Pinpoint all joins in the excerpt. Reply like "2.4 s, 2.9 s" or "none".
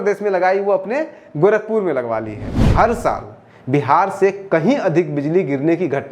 2.6 s